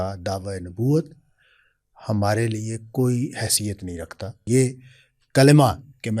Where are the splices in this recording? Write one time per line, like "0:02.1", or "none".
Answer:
0:04.4